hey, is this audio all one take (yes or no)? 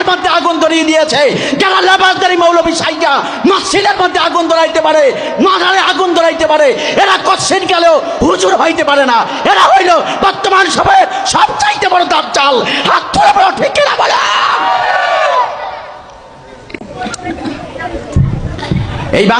yes